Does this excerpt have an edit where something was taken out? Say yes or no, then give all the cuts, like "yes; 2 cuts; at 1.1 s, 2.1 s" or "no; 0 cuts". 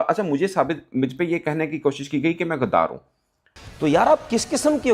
no; 0 cuts